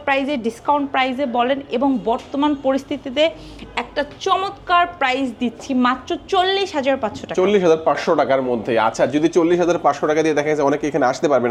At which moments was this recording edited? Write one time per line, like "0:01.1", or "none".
none